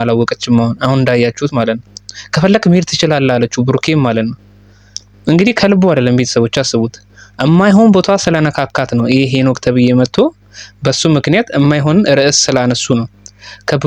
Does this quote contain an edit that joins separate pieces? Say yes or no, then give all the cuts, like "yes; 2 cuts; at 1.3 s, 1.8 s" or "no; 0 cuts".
no; 0 cuts